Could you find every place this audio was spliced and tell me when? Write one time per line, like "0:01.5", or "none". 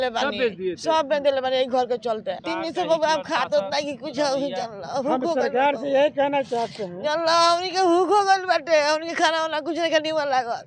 0:02.4